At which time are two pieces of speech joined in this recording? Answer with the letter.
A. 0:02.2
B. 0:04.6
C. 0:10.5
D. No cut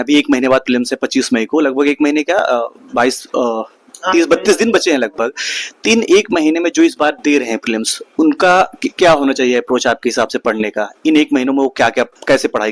D